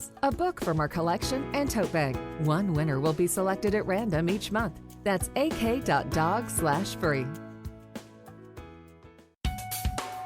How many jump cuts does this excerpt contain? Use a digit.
1